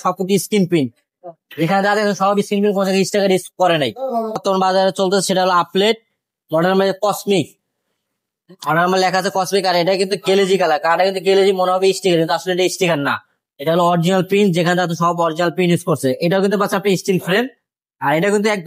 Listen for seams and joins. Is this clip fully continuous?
no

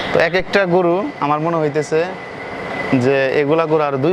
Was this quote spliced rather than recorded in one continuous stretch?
no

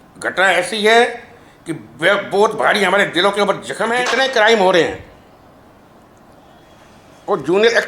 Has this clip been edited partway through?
yes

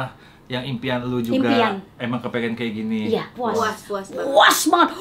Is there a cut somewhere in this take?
yes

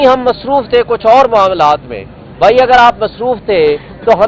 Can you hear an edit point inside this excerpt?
no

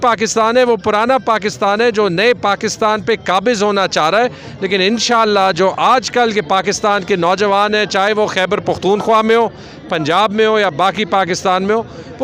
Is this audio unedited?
yes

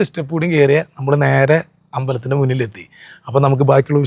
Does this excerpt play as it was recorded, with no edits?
yes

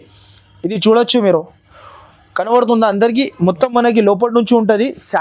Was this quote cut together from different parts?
no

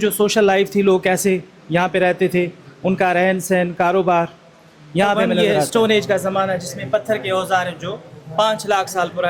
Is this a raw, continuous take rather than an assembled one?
no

